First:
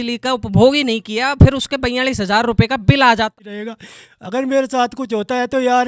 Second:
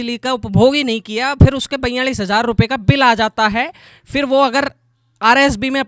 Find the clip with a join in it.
first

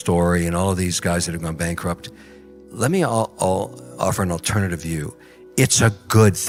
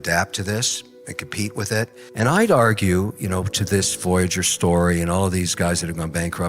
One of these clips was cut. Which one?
second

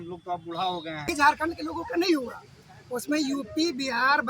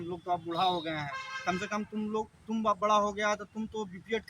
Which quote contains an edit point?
first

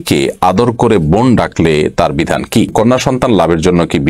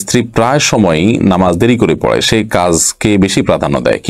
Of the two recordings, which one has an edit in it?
first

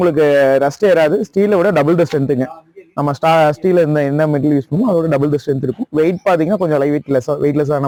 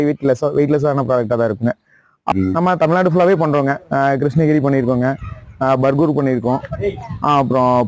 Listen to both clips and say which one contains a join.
second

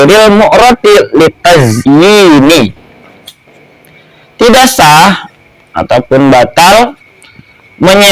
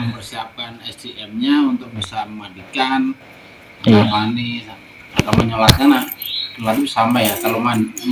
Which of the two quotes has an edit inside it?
first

